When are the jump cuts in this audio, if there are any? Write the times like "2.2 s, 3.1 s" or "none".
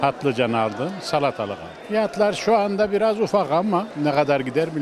1.7 s, 3.9 s